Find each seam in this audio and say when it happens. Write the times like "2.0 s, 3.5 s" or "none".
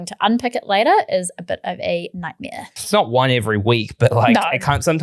2.7 s